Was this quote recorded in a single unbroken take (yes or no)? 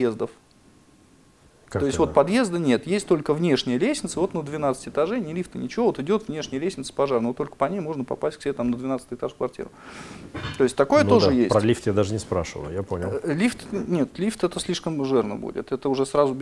yes